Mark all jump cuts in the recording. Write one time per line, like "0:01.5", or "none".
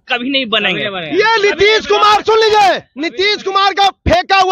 none